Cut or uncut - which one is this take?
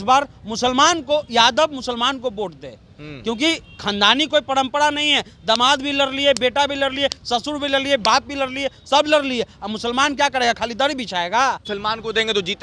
cut